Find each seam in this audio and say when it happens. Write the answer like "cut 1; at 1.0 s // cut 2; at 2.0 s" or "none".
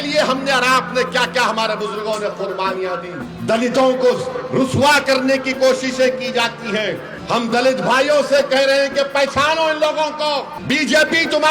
cut 1; at 3.3 s // cut 2; at 7.1 s // cut 3; at 10.5 s